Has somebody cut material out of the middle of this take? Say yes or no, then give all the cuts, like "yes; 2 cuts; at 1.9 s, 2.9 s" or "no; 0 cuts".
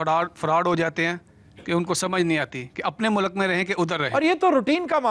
no; 0 cuts